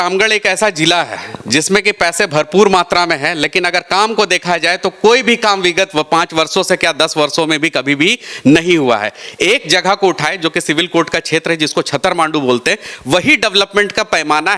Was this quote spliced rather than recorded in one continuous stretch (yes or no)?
no